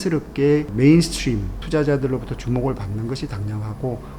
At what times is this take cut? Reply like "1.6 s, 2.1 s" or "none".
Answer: 1.5 s